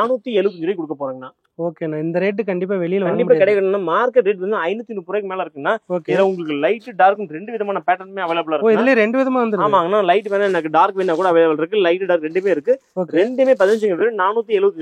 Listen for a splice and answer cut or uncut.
uncut